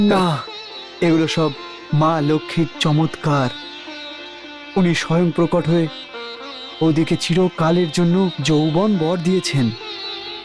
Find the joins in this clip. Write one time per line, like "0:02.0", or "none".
none